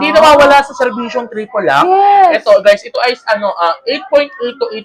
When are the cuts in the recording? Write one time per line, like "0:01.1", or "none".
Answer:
none

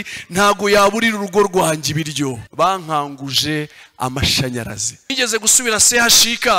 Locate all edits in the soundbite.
0:02.4
0:05.1

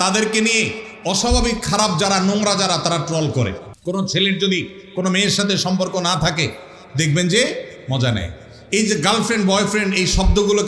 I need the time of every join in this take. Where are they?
0:03.7

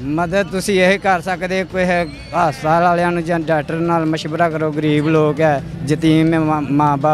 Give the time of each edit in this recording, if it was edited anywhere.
none

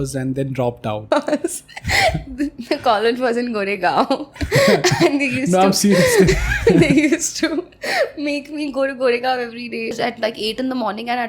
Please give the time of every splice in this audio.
0:01.0
0:10.0

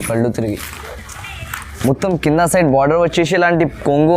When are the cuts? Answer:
0:01.7

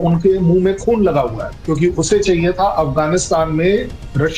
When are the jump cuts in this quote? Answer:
0:01.5

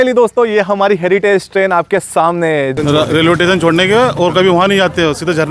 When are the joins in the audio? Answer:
0:02.8

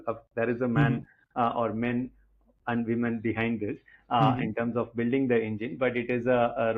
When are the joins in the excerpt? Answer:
none

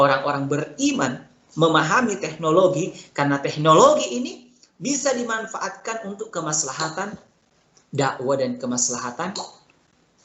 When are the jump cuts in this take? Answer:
none

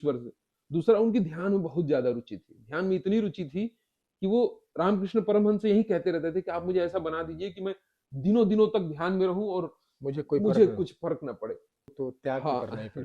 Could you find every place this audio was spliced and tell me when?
0:11.8

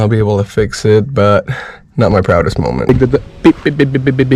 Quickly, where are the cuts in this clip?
0:02.9

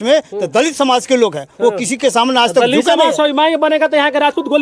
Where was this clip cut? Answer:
none

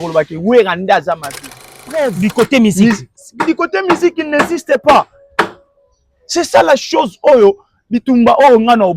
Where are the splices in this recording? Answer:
0:01.9

